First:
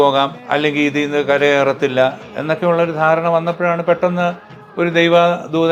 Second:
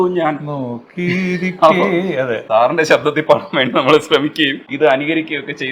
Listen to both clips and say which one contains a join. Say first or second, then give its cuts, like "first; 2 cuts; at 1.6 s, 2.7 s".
second; 2 cuts; at 2.4 s, 4.6 s